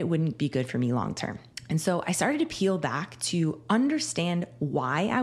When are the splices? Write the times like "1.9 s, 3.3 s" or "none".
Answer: 1.5 s